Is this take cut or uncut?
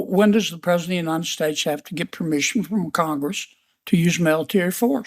uncut